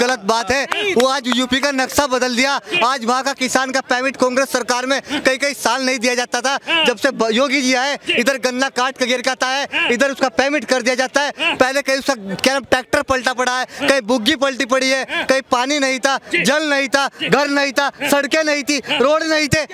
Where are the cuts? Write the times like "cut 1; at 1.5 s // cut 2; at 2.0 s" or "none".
none